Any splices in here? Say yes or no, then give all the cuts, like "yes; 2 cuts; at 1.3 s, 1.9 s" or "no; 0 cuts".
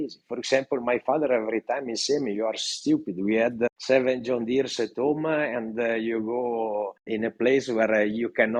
no; 0 cuts